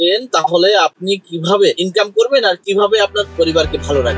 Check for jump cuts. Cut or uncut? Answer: cut